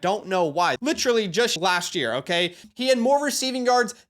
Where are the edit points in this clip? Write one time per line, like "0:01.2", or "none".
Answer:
0:00.8
0:01.5
0:02.6